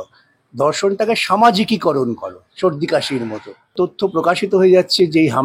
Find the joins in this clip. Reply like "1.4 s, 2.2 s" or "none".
3.7 s